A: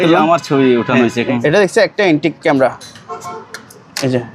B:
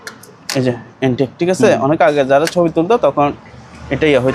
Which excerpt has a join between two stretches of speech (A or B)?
A